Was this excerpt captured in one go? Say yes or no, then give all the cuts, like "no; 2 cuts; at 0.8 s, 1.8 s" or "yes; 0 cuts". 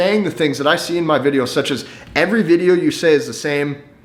yes; 0 cuts